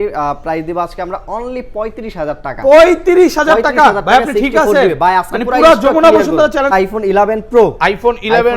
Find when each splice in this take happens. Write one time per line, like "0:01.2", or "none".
0:06.7